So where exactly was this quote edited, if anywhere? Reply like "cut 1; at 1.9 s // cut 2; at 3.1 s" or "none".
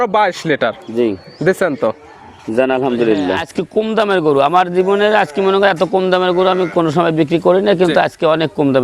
cut 1; at 3.4 s